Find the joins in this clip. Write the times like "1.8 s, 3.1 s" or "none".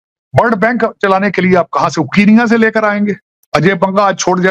3.2 s